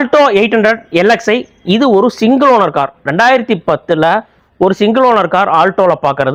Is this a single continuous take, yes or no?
yes